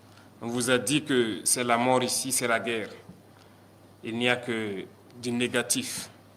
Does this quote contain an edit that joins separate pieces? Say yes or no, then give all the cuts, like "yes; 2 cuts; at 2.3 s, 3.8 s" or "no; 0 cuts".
no; 0 cuts